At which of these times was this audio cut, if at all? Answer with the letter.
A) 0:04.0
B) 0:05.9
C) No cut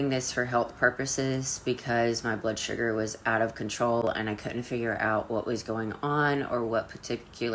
A